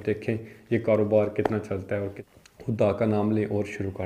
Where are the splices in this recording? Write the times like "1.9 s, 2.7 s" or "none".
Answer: 2.2 s